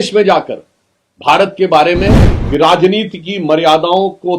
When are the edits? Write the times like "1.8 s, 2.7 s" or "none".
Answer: 2.3 s